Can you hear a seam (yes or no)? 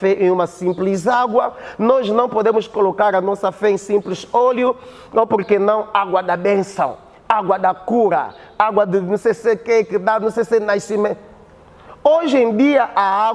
no